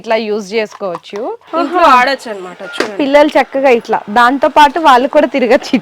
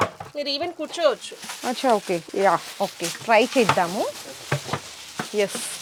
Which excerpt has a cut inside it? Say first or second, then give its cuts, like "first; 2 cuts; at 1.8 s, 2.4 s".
first; 1 cut; at 1.4 s